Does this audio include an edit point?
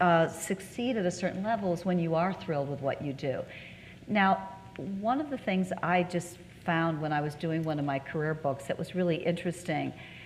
no; 0 cuts

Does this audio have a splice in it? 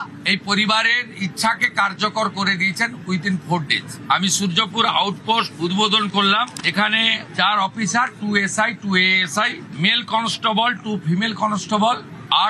no; 0 cuts

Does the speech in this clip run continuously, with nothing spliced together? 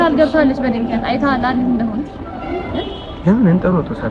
yes; 0 cuts

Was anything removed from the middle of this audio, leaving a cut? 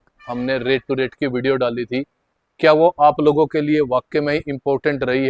no; 0 cuts

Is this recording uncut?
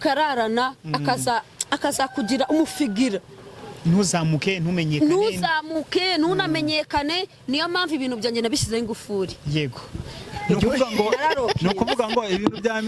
yes; 0 cuts

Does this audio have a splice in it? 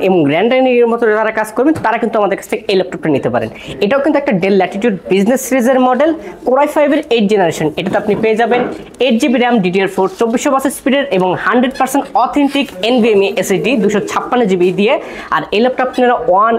no; 0 cuts

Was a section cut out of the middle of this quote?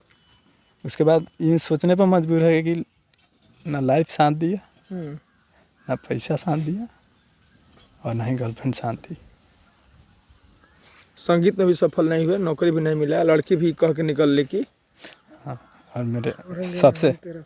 no; 0 cuts

